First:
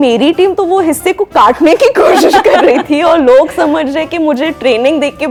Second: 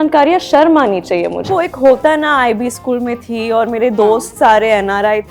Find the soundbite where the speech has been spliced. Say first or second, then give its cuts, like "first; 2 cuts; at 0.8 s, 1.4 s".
second; 1 cut; at 1.5 s